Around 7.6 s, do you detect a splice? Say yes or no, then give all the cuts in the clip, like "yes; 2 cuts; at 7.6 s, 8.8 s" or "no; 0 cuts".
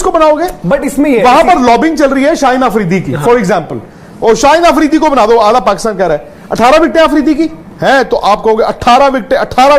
yes; 1 cut; at 7.6 s